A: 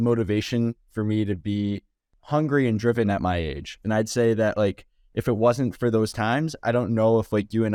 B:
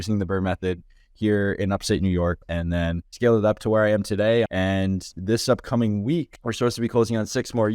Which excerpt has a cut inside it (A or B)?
B